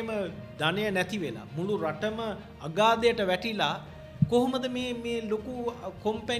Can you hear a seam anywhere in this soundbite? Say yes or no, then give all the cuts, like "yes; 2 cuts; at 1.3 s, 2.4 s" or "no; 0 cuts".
no; 0 cuts